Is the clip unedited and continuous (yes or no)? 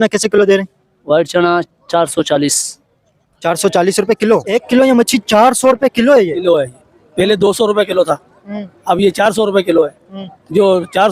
no